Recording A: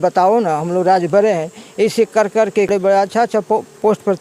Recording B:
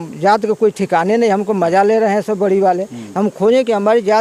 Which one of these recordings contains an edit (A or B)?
A